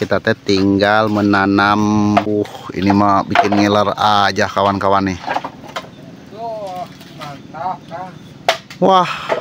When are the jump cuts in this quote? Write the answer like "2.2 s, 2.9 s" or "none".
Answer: 2.3 s